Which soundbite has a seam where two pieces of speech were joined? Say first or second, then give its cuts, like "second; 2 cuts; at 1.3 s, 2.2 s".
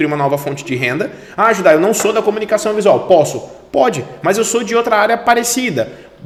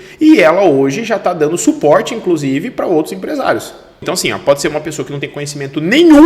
second; 1 cut; at 4.0 s